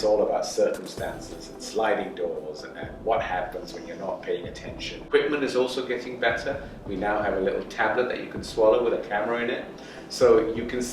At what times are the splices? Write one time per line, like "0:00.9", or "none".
0:05.0